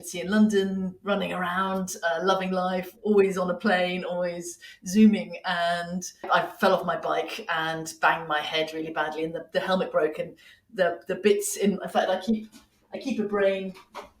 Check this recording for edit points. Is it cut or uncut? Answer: cut